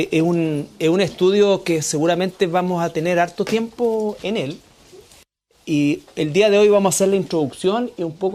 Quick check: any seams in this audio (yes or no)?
no